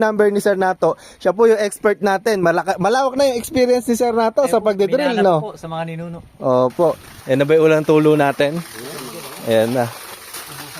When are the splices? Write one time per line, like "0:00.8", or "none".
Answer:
0:07.1

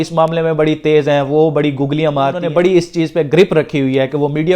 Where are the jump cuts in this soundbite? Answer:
0:02.4

